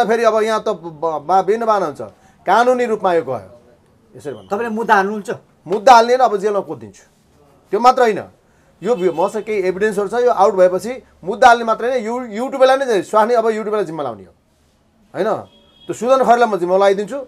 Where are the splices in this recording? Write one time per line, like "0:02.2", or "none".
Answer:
none